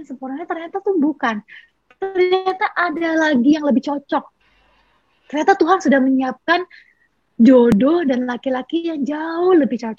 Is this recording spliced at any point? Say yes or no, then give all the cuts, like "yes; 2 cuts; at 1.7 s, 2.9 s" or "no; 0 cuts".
no; 0 cuts